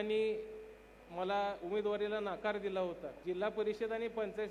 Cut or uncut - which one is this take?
cut